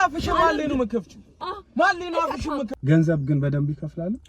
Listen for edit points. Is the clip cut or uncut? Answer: cut